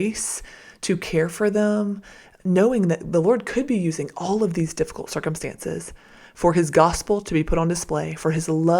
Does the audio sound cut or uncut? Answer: cut